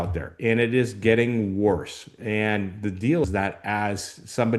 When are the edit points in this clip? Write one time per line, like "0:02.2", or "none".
none